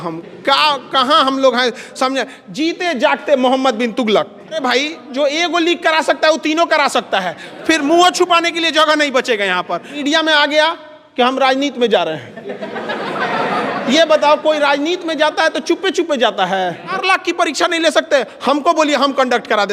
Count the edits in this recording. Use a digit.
3